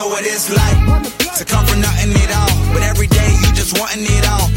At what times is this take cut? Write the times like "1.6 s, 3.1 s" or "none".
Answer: none

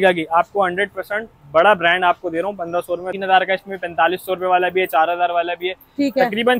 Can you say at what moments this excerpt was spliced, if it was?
3.1 s

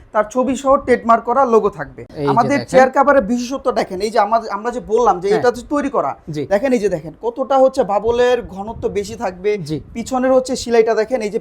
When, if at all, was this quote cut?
2.1 s

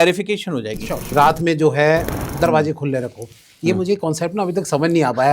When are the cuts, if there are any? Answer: 1.1 s

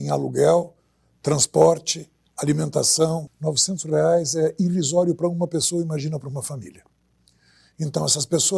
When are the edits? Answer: 3.3 s

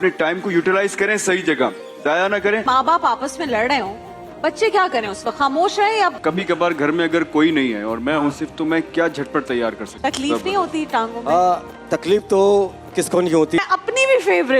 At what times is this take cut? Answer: 2.6 s, 6.2 s, 9.9 s, 13.6 s

